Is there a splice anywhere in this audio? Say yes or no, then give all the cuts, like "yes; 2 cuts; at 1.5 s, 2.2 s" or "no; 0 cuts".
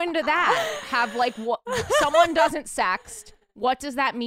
no; 0 cuts